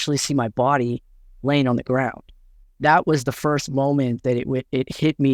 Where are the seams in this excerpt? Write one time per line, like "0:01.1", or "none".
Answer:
none